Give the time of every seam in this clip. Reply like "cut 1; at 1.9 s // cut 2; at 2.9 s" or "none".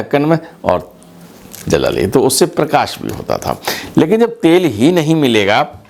none